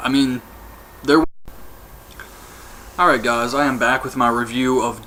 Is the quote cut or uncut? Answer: uncut